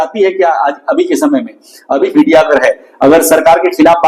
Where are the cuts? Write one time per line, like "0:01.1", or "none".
0:02.1